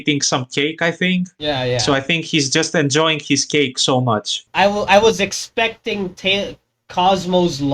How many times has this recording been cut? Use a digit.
1